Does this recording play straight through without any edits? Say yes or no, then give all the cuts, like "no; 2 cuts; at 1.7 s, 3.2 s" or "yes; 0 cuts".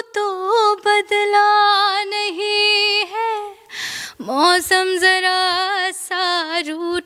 yes; 0 cuts